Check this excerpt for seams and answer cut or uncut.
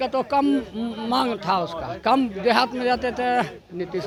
uncut